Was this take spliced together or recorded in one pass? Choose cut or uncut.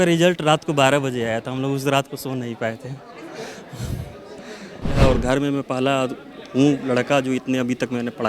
cut